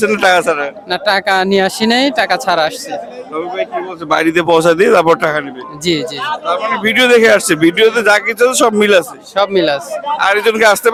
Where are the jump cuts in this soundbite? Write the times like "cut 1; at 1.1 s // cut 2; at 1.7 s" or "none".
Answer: none